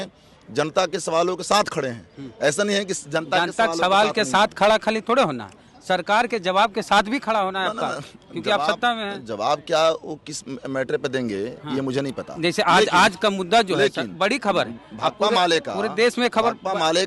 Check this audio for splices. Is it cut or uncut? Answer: uncut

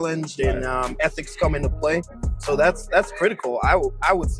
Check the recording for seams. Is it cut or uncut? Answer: uncut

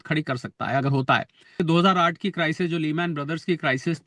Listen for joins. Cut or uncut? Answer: cut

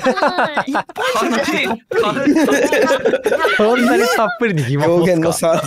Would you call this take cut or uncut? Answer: uncut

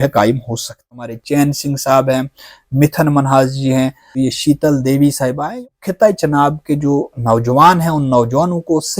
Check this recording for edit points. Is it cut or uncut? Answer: cut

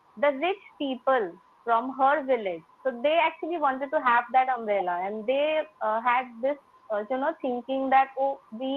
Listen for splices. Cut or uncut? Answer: uncut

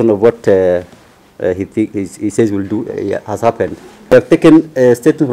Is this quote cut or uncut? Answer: cut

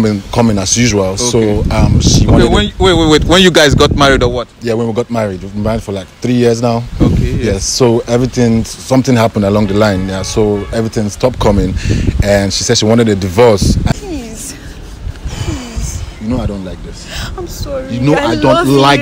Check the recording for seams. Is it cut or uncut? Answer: cut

